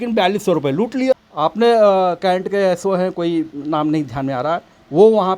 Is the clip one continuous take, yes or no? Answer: no